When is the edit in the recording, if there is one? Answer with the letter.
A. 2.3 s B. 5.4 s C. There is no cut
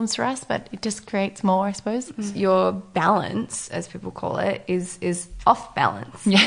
A